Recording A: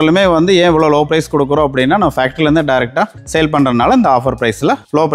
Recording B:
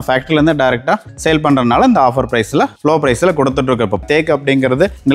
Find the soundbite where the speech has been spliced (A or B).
B